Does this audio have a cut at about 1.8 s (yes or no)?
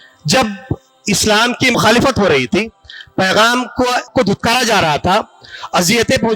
yes